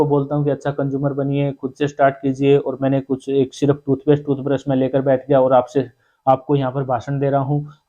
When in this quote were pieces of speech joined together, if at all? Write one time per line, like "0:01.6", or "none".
none